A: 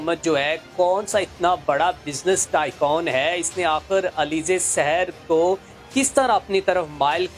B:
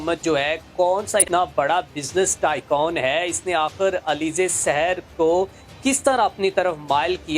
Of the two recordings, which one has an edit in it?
B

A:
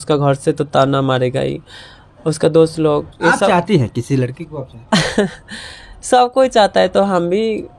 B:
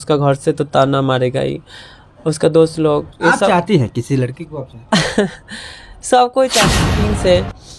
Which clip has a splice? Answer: B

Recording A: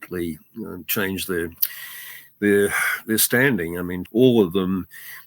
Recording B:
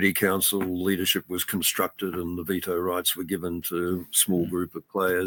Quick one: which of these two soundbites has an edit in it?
A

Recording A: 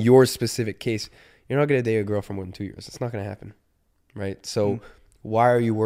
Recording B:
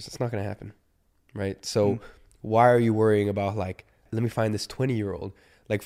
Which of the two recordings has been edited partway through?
B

